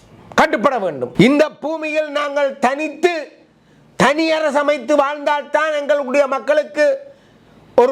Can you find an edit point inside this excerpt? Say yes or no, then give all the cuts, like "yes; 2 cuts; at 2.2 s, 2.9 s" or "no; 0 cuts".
yes; 1 cut; at 1.1 s